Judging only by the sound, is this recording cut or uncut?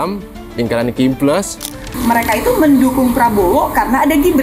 cut